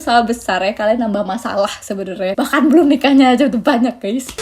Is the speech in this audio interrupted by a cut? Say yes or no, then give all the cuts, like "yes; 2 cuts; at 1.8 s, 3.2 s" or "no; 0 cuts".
yes; 1 cut; at 2.3 s